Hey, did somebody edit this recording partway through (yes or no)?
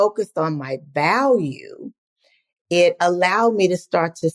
no